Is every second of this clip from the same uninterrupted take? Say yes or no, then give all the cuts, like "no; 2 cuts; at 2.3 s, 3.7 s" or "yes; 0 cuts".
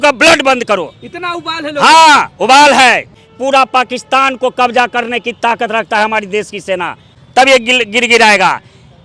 no; 2 cuts; at 3.1 s, 7.2 s